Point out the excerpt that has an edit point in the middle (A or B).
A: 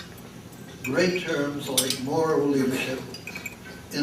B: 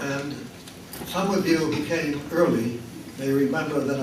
B